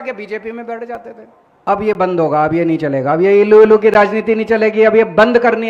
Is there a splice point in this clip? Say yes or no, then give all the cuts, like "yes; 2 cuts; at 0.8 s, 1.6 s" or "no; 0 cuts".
yes; 1 cut; at 1.7 s